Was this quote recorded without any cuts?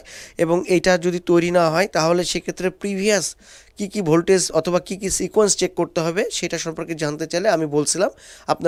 yes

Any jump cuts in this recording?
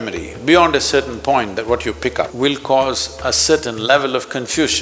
yes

